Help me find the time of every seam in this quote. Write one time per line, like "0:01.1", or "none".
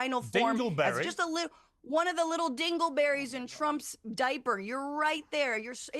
none